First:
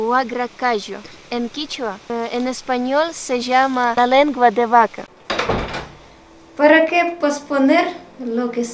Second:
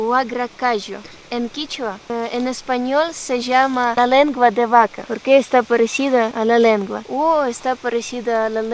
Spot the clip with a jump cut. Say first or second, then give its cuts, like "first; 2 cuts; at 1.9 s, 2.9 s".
first; 1 cut; at 5.1 s